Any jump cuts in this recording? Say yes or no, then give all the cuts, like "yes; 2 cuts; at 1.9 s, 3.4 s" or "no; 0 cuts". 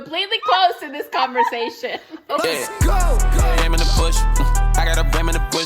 yes; 1 cut; at 2.4 s